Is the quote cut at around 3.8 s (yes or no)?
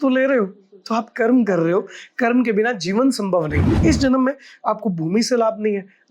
yes